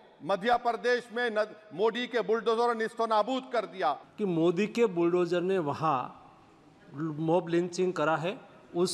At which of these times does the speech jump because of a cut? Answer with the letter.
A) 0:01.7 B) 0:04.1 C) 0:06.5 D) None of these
B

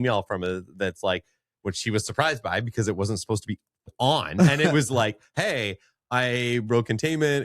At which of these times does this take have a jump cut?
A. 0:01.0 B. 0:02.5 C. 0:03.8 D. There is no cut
C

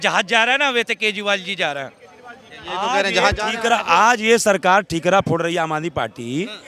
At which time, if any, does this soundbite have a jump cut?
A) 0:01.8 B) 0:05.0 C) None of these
C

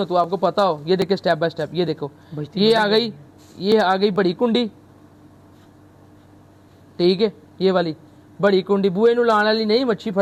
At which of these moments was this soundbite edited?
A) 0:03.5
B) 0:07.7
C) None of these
C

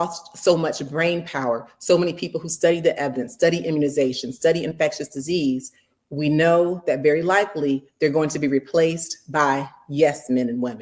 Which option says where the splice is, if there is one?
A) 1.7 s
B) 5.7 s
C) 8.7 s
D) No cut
D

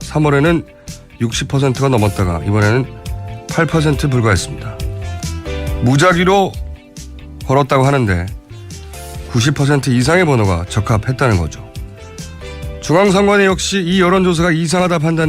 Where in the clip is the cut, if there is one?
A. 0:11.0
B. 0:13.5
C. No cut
B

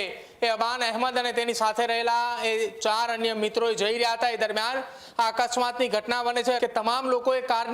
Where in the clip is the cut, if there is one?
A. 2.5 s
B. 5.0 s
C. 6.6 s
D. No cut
C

